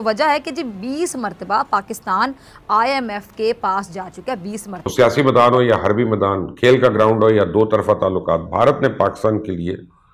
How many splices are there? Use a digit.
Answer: 1